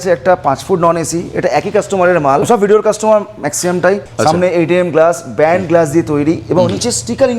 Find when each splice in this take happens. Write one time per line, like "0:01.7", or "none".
0:02.5
0:04.1